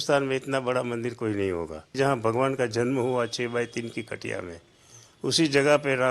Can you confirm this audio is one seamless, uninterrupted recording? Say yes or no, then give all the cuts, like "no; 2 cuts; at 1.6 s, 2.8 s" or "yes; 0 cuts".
no; 1 cut; at 1.9 s